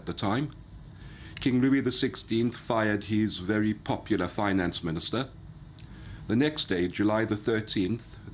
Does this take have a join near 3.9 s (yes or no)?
yes